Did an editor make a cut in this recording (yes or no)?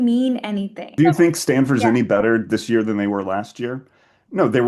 yes